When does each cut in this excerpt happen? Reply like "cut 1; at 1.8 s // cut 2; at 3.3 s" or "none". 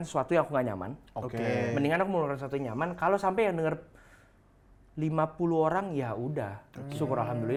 none